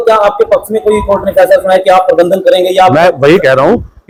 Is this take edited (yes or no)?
no